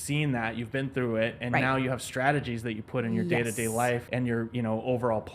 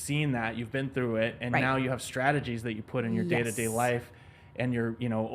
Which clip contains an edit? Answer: first; 1 cut; at 4.1 s

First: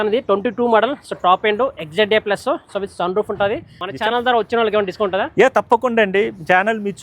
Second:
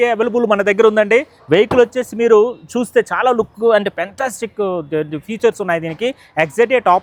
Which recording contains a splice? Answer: first; 1 cut; at 3.8 s

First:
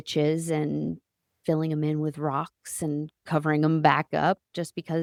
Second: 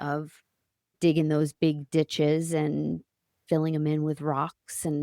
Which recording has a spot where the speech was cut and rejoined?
second; 1 cut; at 0.9 s

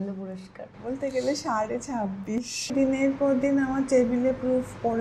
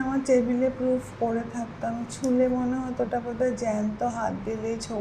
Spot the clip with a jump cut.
first; 1 cut; at 2.7 s

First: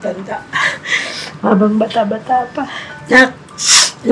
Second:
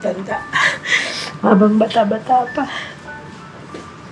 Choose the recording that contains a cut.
first; 1 cut; at 2.9 s

